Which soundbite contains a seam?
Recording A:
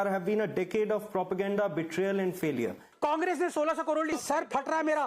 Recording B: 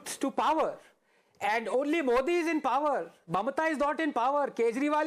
A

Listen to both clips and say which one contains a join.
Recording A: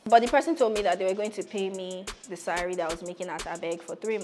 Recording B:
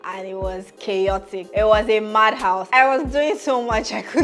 B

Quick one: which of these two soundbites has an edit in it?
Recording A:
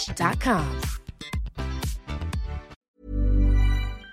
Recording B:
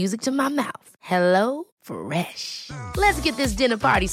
A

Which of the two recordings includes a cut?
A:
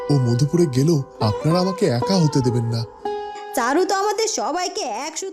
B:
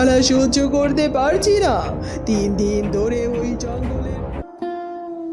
B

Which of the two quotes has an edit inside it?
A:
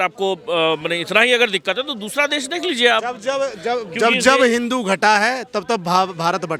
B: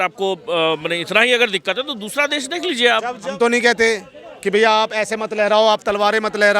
B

